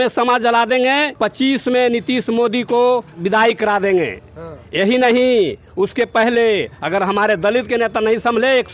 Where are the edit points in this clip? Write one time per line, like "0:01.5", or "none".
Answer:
0:03.2

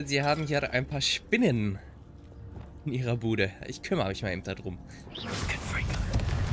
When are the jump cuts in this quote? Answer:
none

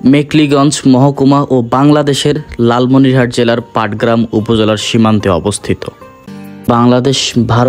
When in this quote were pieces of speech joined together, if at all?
0:06.7

